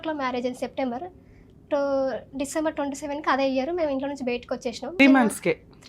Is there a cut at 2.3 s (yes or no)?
no